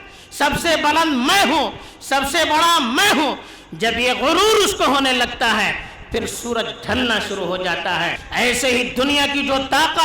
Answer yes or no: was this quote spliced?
yes